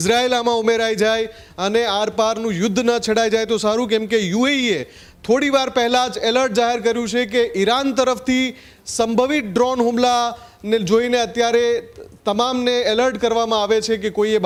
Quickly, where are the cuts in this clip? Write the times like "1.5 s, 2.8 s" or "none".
none